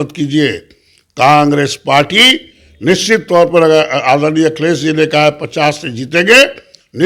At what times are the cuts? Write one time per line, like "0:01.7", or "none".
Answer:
none